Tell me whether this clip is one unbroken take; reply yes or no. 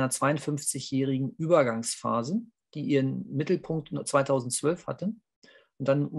yes